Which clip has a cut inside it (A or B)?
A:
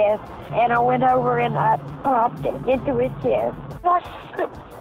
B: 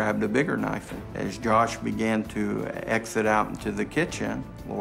A